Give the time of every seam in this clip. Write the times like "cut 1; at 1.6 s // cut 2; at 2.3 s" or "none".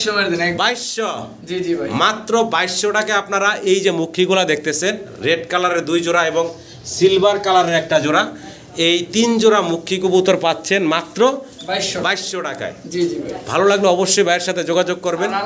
none